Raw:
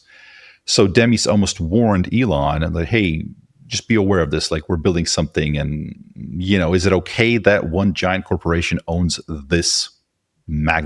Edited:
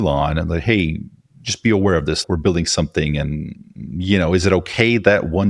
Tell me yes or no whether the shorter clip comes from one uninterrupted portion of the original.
no